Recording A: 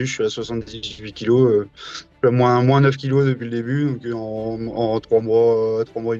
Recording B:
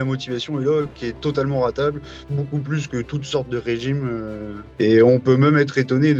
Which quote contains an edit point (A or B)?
B